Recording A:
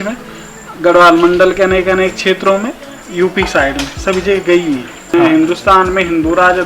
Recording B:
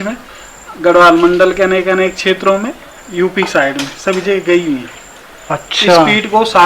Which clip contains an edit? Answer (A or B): A